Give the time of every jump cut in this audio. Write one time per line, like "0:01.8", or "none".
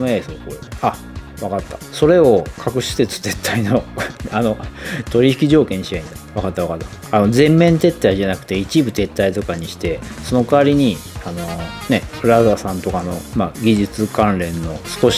0:12.1